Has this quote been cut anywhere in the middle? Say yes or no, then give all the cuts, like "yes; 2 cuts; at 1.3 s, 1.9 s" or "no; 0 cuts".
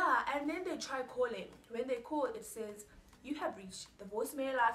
no; 0 cuts